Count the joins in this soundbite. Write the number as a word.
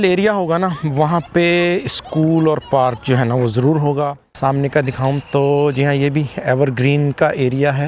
one